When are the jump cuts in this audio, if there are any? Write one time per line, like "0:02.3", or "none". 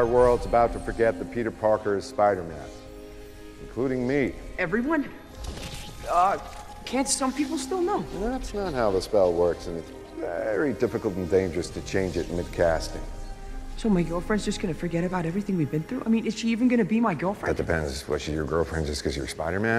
0:02.5